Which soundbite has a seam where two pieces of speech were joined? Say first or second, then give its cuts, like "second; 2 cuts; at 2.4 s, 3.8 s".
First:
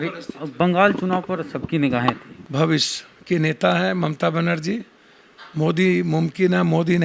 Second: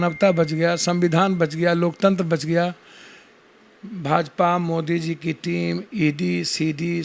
first; 1 cut; at 2.3 s